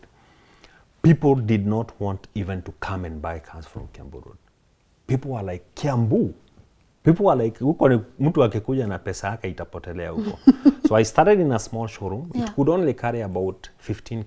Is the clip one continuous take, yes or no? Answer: yes